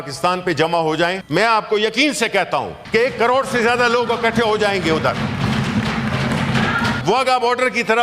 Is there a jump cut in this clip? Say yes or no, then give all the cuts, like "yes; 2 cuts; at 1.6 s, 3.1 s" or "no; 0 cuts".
yes; 3 cuts; at 1.2 s, 2.8 s, 7.0 s